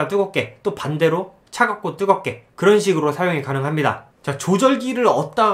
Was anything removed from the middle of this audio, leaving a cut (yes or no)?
yes